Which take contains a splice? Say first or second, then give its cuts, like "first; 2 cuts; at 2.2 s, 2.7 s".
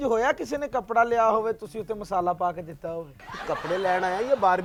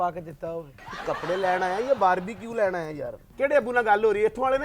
second; 1 cut; at 3.3 s